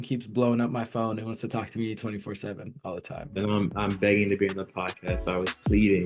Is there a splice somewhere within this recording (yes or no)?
no